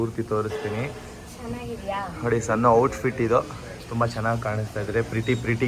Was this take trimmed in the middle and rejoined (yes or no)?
no